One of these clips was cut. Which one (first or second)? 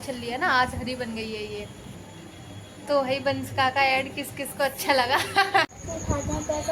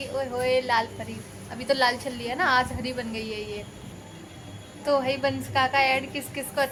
first